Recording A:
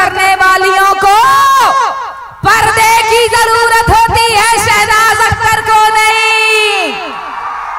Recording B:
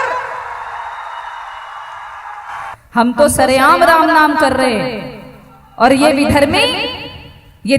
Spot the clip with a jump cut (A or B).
B